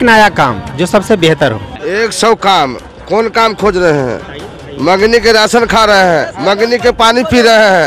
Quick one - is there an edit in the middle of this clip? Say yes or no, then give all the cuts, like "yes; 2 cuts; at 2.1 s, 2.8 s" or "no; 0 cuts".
yes; 1 cut; at 1.7 s